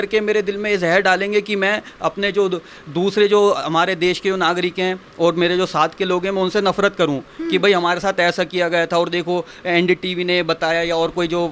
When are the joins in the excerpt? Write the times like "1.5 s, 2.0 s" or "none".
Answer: none